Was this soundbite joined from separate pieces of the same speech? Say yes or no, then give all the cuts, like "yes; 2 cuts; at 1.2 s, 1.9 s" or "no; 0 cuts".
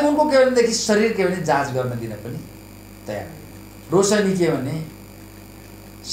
yes; 1 cut; at 3.8 s